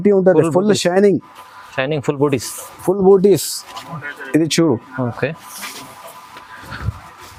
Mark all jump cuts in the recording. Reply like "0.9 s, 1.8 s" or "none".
none